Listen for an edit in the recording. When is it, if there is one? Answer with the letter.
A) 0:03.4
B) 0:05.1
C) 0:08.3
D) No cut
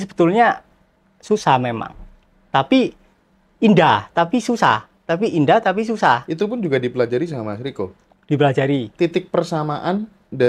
D